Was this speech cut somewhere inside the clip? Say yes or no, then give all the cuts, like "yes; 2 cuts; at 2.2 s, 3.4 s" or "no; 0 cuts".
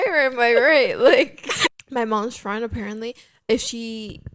yes; 1 cut; at 1.8 s